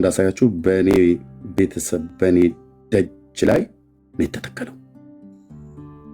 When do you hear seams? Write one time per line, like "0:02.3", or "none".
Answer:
0:04.7

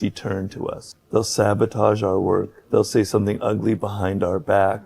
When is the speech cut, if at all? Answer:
0:00.9
0:02.6

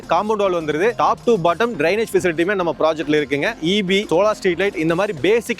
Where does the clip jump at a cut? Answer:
0:01.0
0:03.6

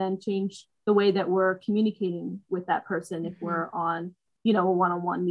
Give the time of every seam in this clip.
none

